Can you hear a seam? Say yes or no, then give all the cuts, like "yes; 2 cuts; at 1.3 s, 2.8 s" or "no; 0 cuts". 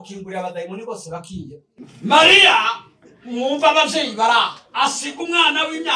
yes; 1 cut; at 1.7 s